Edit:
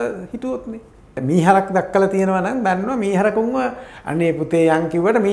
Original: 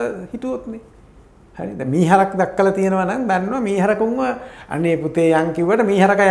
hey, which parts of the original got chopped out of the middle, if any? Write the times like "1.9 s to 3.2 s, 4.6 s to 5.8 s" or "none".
1.1 s to 1.8 s